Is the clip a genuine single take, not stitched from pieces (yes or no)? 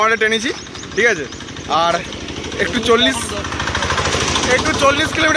yes